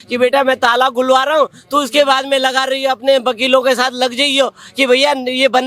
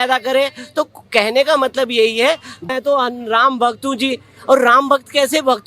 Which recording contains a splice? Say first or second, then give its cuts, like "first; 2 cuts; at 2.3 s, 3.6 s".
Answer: second; 1 cut; at 2.7 s